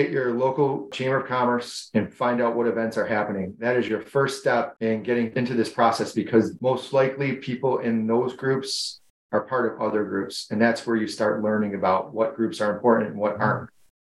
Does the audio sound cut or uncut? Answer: cut